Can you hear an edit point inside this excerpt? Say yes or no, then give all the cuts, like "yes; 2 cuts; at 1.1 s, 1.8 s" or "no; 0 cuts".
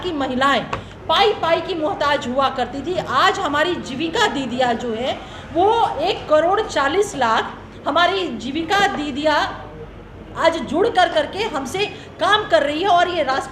no; 0 cuts